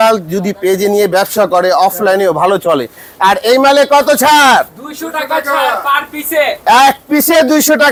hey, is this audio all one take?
yes; 0 cuts

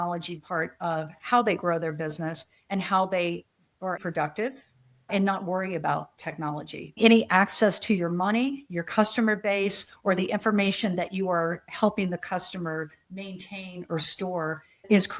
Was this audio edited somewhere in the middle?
yes; 1 cut; at 6.8 s

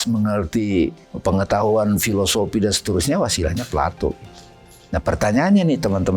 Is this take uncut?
no; 1 cut; at 1.1 s

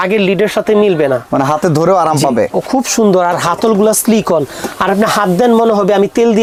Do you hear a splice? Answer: no; 0 cuts

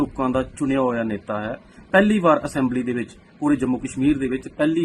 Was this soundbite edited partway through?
no; 0 cuts

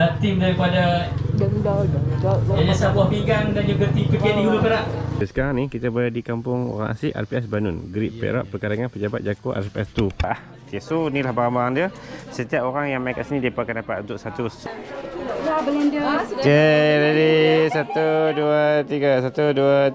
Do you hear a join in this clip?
yes; 3 cuts; at 5.2 s, 10.3 s, 14.7 s

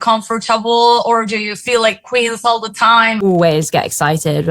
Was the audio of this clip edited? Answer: yes; 1 cut; at 3.2 s

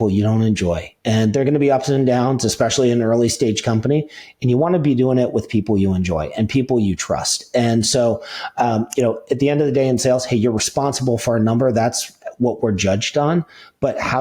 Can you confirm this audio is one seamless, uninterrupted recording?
yes; 0 cuts

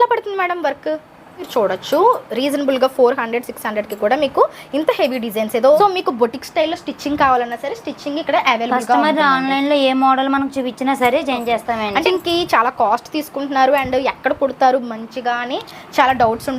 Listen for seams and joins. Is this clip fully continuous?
no; 3 cuts; at 1.5 s, 5.8 s, 12.1 s

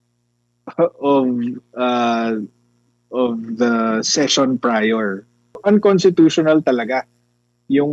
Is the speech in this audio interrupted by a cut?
yes; 1 cut; at 5.6 s

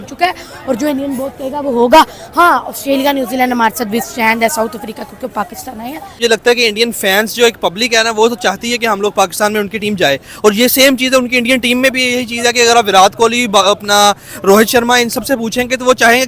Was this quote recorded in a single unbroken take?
no; 1 cut; at 6.2 s

